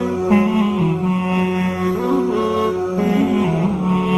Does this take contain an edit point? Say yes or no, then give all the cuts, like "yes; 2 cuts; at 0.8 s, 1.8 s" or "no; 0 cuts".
no; 0 cuts